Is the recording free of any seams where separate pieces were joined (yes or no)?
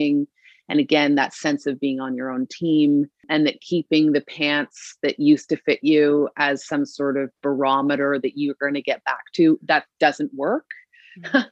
no